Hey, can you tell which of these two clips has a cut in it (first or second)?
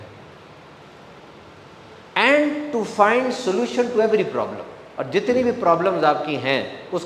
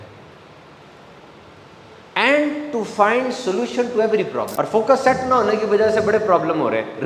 second